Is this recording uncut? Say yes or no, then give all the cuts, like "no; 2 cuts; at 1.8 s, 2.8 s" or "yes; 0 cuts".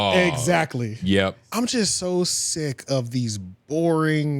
no; 1 cut; at 1.4 s